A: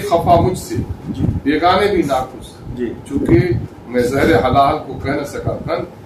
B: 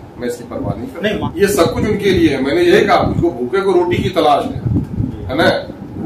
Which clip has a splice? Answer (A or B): B